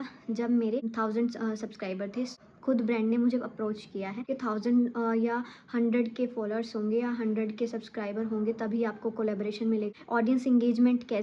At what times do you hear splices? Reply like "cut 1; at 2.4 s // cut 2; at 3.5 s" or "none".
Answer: cut 1; at 0.9 s // cut 2; at 2.3 s // cut 3; at 4.2 s // cut 4; at 9.9 s